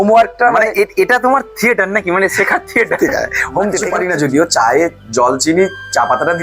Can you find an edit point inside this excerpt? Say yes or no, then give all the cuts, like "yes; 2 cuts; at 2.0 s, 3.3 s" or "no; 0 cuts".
yes; 1 cut; at 3.9 s